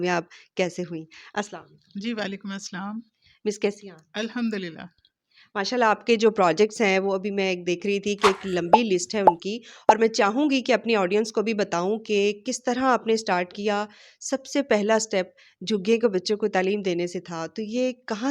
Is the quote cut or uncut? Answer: uncut